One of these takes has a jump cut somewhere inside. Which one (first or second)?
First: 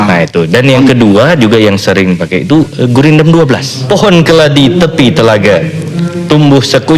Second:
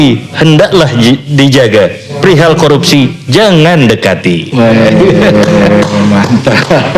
first